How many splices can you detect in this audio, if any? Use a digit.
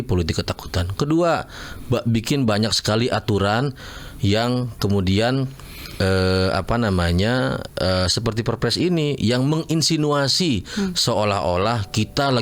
0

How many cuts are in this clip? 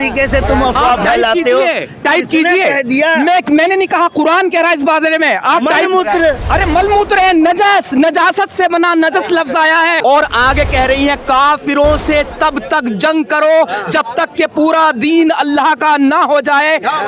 1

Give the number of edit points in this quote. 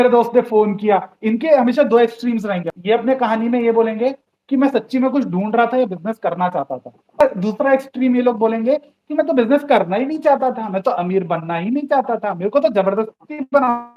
2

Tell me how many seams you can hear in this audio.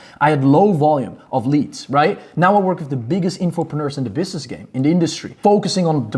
1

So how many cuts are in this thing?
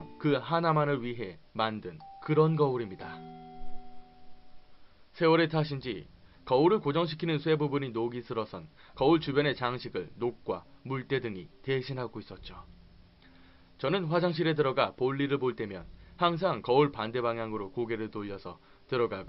1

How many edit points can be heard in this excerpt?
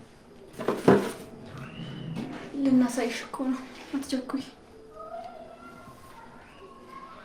1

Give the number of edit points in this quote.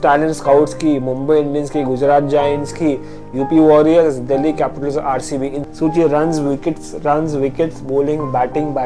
1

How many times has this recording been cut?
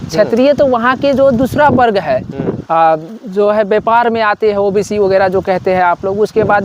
1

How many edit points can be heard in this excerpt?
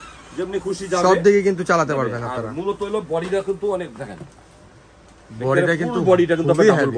0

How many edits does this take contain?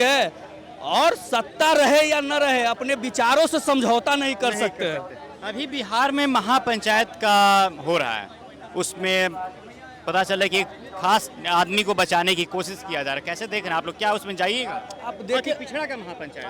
0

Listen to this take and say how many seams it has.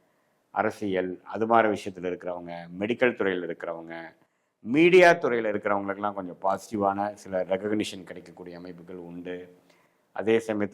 0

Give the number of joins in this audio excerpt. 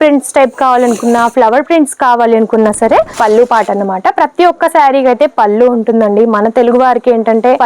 1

